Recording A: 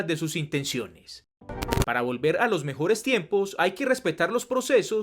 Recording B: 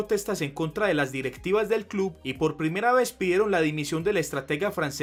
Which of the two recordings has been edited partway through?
A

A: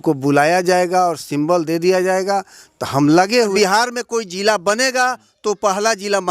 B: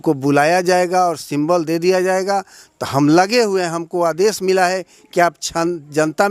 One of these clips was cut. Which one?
A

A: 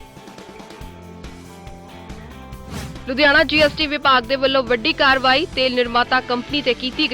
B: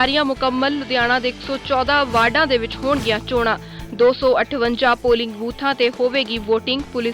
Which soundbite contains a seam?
A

